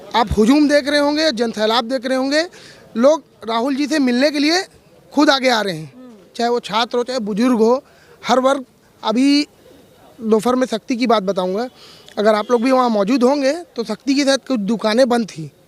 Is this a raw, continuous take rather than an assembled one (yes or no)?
yes